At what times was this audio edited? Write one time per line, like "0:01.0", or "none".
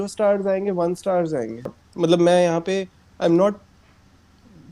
0:01.8